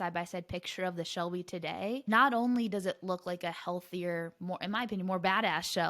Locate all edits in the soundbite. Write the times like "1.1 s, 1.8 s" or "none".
2.0 s